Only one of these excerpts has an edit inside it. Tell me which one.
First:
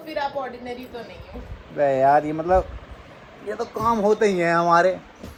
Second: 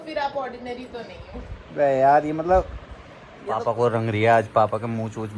second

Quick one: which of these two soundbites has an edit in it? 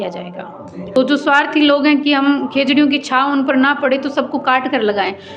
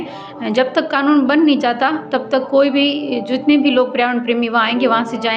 first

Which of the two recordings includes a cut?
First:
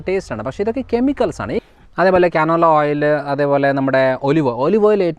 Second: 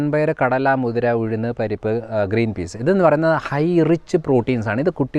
first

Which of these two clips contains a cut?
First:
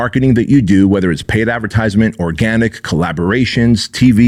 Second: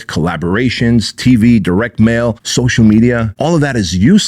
second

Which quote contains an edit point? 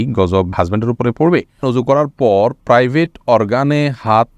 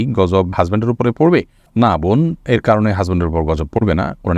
first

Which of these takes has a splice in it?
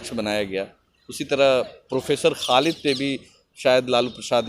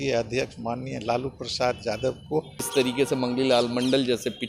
second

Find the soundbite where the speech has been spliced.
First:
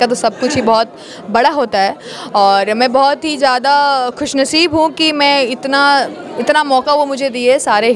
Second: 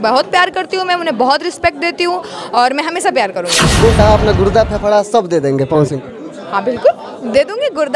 second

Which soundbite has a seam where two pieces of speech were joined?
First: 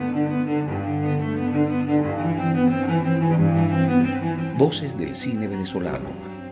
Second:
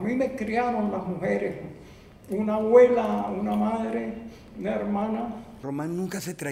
second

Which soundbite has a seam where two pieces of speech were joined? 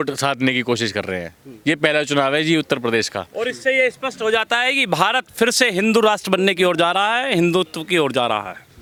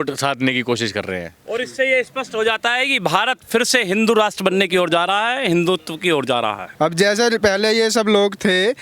second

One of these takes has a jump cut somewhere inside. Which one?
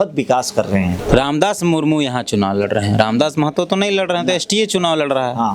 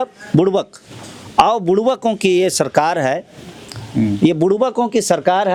first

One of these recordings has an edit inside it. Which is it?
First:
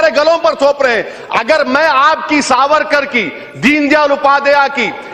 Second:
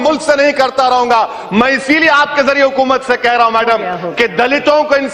first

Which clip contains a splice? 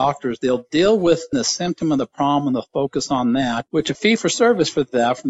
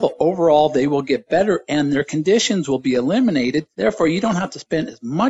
first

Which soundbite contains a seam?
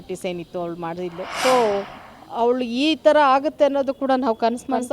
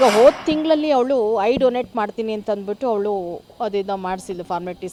first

